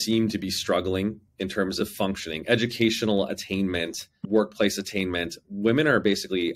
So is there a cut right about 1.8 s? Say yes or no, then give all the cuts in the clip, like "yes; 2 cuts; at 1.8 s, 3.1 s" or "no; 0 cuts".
yes; 1 cut; at 1.8 s